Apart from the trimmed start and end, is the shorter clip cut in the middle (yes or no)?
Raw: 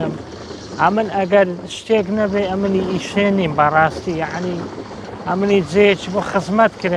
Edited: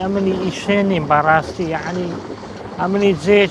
no